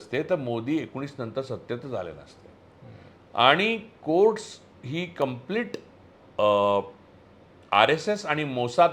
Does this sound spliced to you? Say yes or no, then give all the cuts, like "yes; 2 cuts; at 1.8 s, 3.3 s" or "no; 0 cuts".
no; 0 cuts